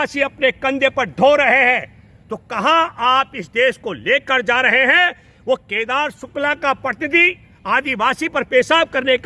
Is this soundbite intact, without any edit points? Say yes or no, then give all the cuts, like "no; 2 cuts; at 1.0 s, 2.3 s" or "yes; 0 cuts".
yes; 0 cuts